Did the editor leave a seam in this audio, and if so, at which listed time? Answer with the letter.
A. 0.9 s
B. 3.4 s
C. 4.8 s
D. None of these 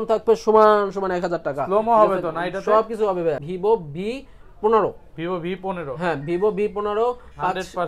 B